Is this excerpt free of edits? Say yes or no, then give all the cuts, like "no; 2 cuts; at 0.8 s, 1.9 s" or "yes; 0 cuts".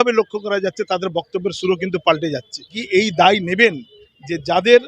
no; 1 cut; at 2.8 s